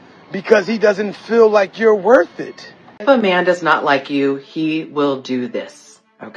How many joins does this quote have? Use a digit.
1